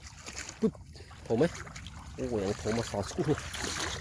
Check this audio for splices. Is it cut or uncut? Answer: uncut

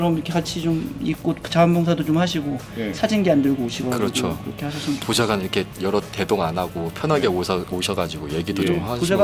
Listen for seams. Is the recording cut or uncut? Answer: uncut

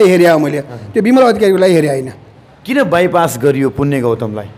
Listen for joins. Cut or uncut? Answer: uncut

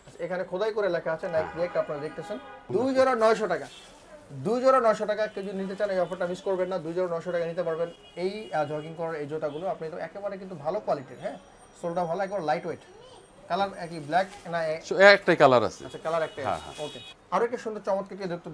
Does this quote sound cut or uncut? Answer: cut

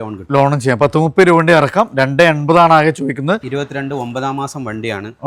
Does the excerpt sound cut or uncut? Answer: cut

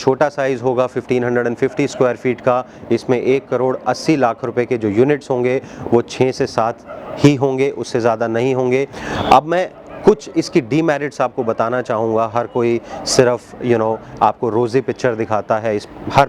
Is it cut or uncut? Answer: cut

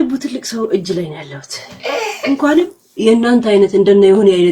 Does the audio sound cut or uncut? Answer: uncut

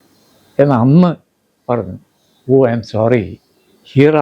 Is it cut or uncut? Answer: uncut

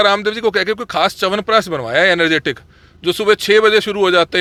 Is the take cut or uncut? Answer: uncut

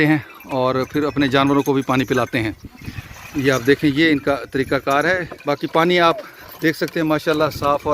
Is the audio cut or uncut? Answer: cut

